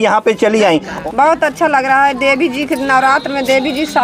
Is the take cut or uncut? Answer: cut